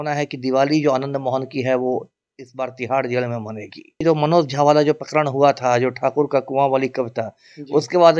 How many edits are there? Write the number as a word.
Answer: one